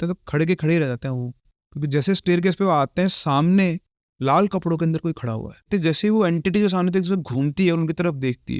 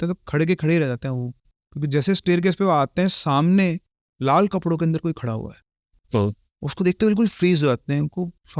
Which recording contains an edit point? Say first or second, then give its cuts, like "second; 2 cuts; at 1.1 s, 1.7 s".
first; 1 cut; at 5.7 s